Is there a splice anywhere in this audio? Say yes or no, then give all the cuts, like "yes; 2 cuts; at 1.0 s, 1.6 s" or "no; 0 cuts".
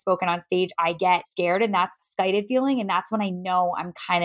yes; 2 cuts; at 1.0 s, 2.0 s